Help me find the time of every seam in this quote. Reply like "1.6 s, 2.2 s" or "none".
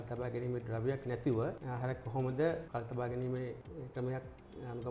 none